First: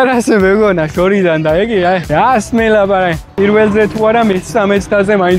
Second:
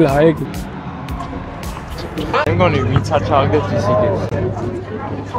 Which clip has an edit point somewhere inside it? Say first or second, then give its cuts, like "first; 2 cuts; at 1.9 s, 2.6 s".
second; 1 cut; at 2.3 s